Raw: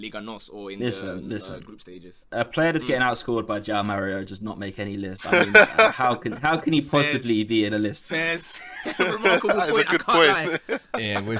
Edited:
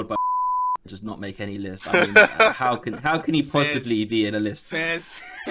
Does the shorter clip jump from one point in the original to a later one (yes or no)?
no